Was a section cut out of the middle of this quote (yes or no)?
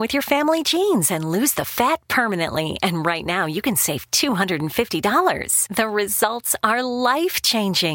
no